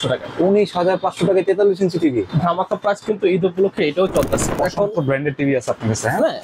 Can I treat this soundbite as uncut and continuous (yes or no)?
no